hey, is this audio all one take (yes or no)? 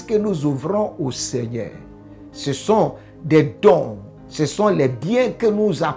yes